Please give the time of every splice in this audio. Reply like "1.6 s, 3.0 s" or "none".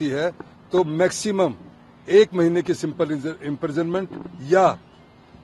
none